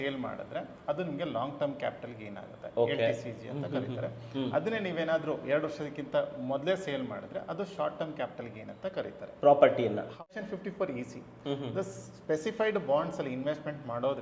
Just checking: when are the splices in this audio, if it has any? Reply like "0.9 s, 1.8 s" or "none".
10.1 s